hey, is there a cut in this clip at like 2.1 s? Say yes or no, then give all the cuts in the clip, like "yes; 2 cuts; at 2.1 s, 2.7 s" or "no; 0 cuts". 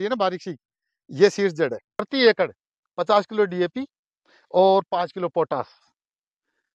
yes; 1 cut; at 2.1 s